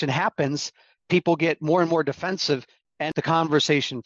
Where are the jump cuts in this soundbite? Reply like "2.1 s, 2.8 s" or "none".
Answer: 3.0 s